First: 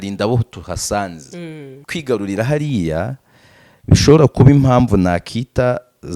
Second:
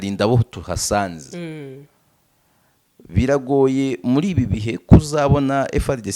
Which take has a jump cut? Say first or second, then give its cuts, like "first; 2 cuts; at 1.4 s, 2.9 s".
first; 1 cut; at 1.7 s